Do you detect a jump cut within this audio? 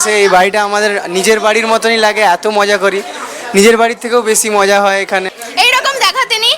yes; 1 cut; at 5.4 s

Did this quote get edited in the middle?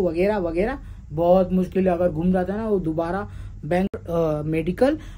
yes; 1 cut; at 3.9 s

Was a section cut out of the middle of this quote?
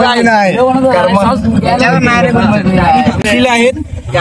yes; 1 cut; at 3.2 s

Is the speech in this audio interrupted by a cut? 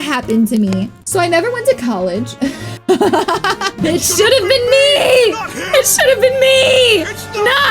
yes; 1 cut; at 3.7 s

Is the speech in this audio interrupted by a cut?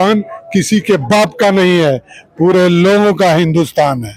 no; 0 cuts

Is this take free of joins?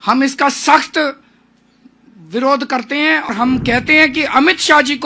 no; 1 cut; at 3.3 s

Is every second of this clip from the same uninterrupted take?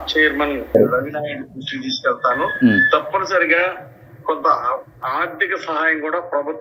yes; 0 cuts

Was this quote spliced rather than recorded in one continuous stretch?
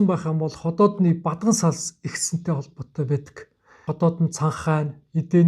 yes; 1 cut; at 3.9 s

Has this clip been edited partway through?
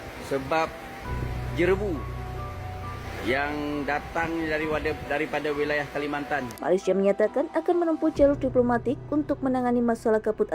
yes; 1 cut; at 6.5 s

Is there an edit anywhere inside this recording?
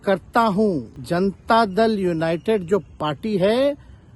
yes; 1 cut; at 0.9 s

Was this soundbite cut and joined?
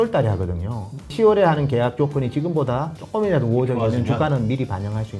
yes; 2 cuts; at 1.1 s, 3.0 s

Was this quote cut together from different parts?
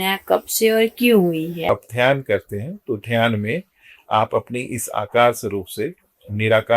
yes; 1 cut; at 1.7 s

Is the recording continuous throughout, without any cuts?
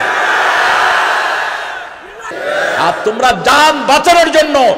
no; 1 cut; at 2.4 s

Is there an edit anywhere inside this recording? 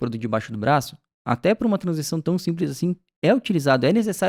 no; 0 cuts

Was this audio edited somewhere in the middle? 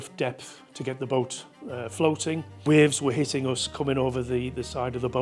yes; 1 cut; at 2.6 s

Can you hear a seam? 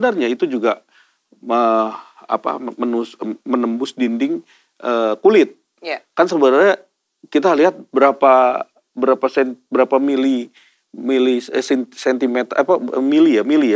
no; 0 cuts

